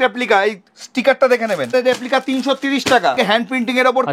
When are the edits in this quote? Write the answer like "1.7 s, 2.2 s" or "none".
1.7 s, 3.2 s

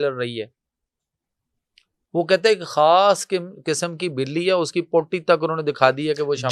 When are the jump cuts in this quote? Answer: none

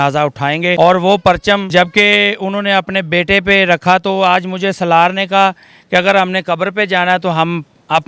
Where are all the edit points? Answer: 0.7 s, 1.7 s

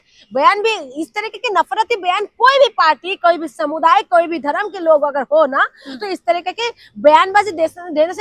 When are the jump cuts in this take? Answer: none

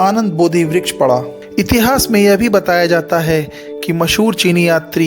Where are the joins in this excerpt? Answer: 1.4 s

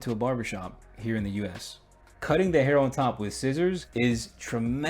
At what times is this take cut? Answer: 2.1 s

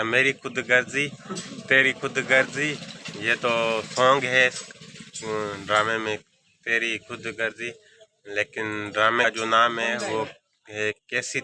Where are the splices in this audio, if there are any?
9.2 s

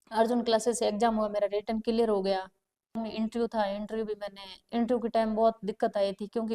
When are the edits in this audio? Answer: 3.0 s

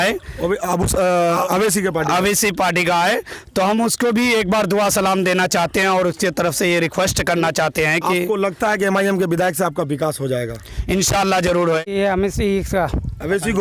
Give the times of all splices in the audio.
11.9 s

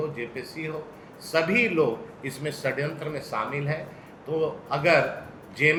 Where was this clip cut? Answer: none

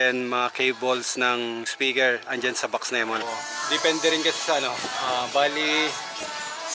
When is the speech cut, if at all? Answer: 3.2 s

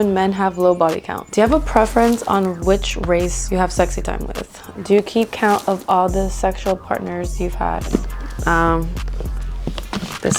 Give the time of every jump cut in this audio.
1.1 s, 4.6 s, 7.8 s

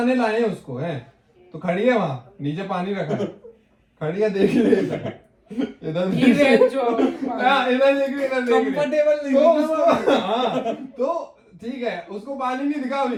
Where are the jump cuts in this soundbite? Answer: none

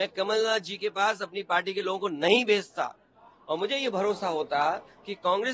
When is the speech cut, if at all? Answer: none

